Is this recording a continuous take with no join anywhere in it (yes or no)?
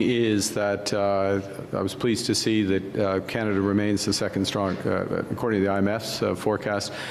yes